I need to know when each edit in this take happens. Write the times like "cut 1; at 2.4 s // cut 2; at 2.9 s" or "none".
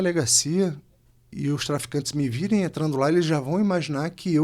none